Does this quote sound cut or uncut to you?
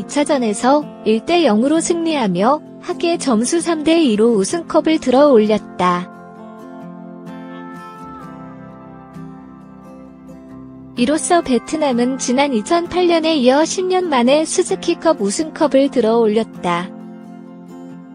uncut